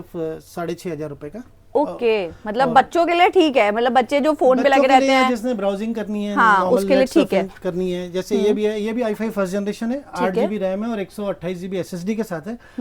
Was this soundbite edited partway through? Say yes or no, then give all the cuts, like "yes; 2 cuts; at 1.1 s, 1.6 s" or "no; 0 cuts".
no; 0 cuts